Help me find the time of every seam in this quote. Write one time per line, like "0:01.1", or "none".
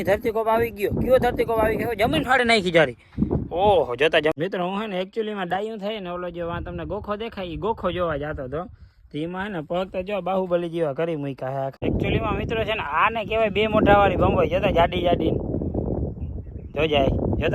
0:04.3
0:11.8